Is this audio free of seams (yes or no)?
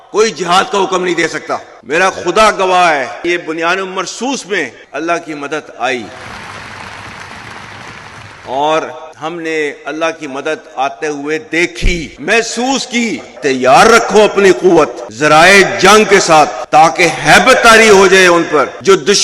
no